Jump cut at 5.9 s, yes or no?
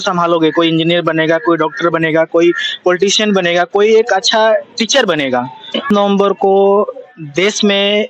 yes